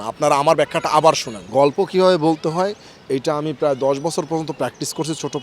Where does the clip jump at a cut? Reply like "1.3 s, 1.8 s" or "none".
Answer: 1.3 s